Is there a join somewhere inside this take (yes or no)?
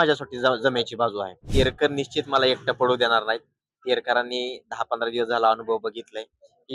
yes